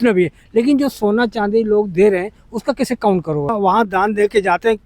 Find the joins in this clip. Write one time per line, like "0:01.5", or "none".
0:03.5